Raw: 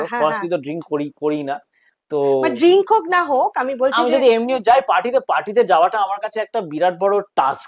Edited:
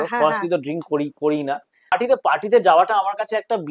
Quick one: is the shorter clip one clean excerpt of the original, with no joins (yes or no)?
no